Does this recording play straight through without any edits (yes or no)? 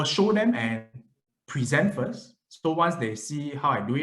yes